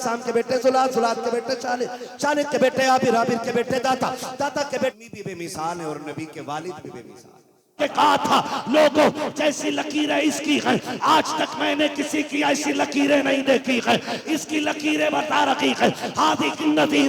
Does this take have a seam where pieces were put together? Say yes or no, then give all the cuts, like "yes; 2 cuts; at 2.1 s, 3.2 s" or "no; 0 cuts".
yes; 2 cuts; at 4.9 s, 7.7 s